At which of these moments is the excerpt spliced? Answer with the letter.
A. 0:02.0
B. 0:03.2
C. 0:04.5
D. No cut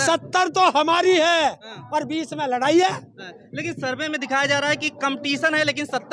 D